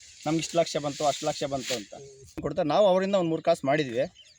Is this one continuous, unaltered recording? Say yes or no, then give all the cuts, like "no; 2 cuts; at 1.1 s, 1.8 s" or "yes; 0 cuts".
no; 1 cut; at 2.4 s